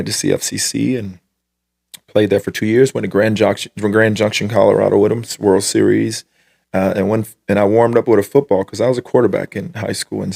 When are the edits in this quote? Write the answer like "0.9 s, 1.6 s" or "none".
none